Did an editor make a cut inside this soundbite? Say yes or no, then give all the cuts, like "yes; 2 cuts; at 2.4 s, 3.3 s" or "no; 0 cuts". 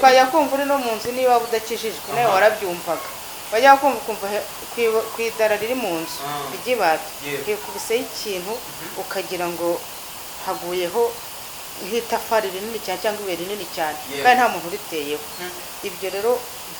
no; 0 cuts